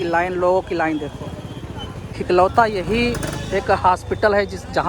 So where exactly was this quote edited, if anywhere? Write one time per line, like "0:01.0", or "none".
0:02.1